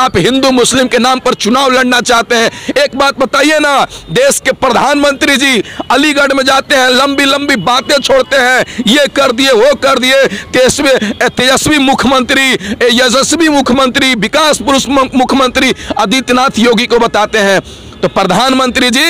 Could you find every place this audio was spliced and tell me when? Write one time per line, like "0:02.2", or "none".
none